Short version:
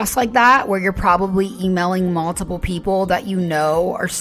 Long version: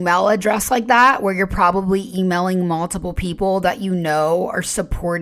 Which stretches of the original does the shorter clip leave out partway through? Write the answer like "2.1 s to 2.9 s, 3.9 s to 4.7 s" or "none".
none